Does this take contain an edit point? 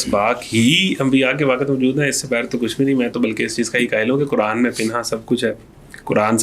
no; 0 cuts

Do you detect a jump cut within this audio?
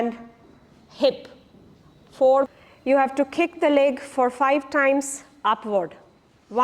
yes; 1 cut; at 2.5 s

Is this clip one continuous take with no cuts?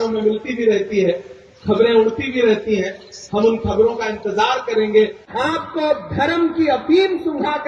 no; 1 cut; at 5.2 s

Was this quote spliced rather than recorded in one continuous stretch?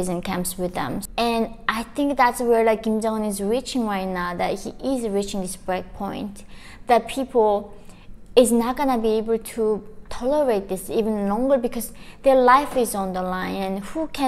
yes; 1 cut; at 1.0 s

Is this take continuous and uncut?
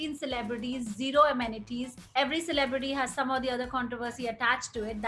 no; 1 cut; at 2.0 s

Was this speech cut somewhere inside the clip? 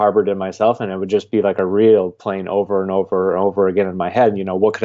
no; 0 cuts

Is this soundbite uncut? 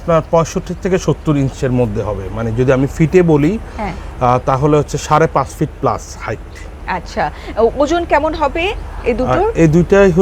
yes; 0 cuts

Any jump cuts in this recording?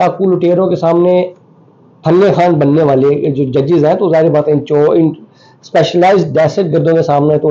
no; 0 cuts

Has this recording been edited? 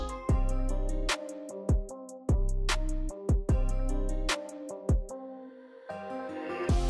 no; 0 cuts

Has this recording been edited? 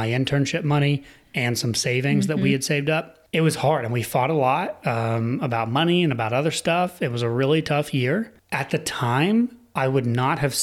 yes; 2 cuts; at 3.2 s, 8.4 s

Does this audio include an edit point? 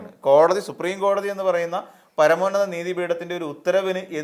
no; 0 cuts

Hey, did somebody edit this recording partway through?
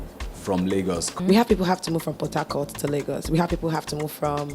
yes; 1 cut; at 1.2 s

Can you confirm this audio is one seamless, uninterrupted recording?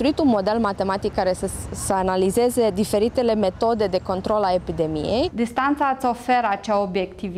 no; 1 cut; at 5.3 s

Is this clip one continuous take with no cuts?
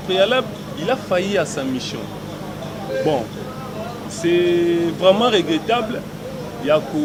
yes; 0 cuts

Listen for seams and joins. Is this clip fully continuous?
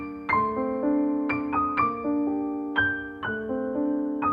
yes; 0 cuts

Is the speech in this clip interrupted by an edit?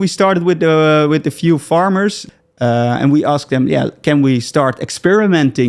yes; 1 cut; at 2.2 s

